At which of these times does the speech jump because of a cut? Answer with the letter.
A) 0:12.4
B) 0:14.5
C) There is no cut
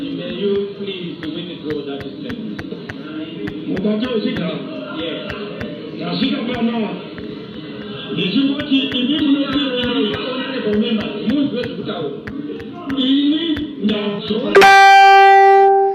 B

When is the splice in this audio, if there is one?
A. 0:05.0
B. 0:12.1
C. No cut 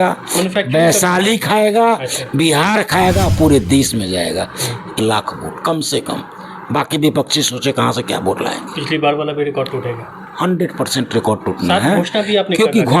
A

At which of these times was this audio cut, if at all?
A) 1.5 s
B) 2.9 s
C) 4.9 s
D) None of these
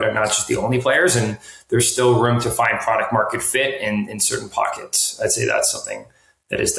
D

